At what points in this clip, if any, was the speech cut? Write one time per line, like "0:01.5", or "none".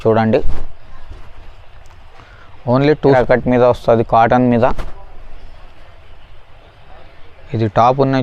0:03.1